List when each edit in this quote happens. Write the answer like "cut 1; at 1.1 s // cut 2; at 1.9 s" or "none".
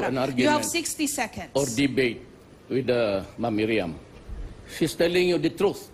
cut 1; at 4.1 s